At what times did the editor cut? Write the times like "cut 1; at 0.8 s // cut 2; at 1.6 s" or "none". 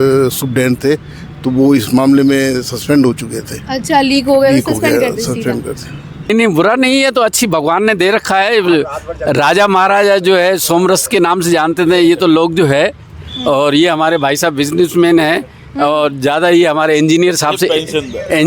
cut 1; at 6.3 s